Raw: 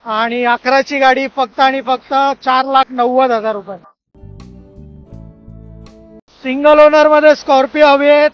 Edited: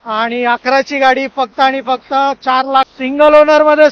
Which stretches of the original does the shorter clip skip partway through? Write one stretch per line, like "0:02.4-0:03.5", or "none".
0:02.9-0:06.4